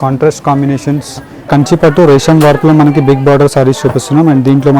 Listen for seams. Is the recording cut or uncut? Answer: cut